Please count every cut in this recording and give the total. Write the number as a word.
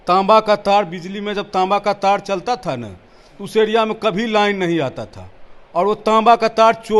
zero